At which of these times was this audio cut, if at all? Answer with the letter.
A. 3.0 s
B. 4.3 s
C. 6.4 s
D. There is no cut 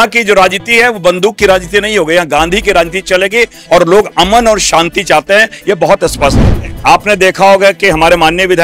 C